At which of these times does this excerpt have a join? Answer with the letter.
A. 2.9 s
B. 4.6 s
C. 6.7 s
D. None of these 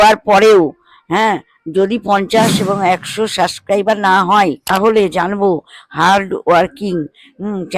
B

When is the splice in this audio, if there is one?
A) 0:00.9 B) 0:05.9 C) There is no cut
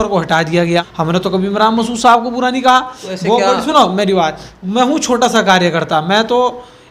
A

